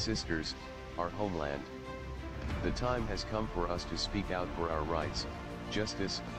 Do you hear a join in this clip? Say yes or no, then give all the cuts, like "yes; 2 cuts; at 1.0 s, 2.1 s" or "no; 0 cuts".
no; 0 cuts